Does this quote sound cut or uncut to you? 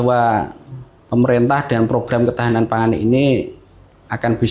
uncut